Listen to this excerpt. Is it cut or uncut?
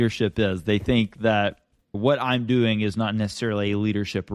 uncut